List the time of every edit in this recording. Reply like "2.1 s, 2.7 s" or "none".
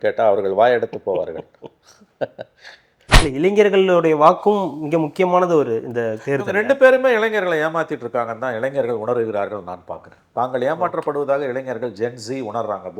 3.0 s

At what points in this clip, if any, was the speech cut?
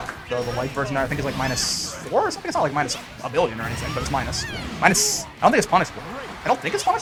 none

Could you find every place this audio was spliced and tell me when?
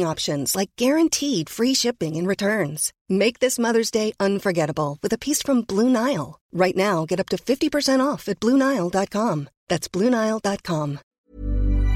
11.1 s

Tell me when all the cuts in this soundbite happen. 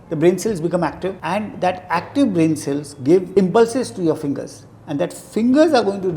1.2 s, 3.3 s

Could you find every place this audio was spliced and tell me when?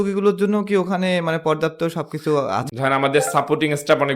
2.6 s

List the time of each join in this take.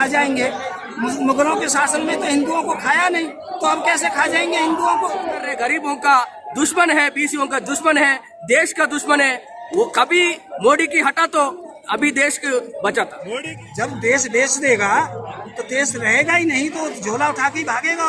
5.5 s, 13.3 s

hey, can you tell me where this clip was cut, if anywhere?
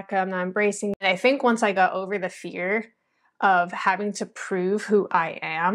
1.0 s

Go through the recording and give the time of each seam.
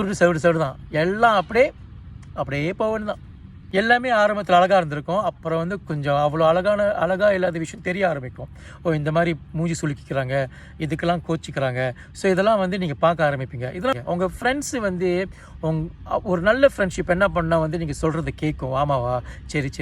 3.6 s, 14.0 s

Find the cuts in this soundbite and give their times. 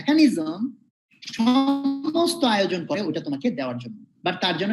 none

